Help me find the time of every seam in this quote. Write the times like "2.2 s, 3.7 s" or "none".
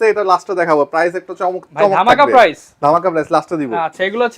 none